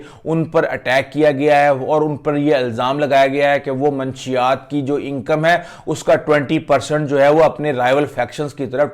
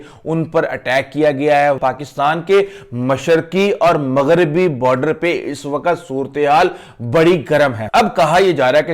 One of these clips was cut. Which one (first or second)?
second